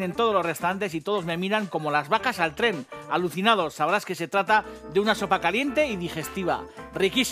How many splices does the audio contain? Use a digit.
1